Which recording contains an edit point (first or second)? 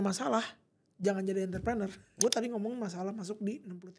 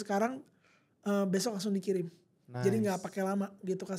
first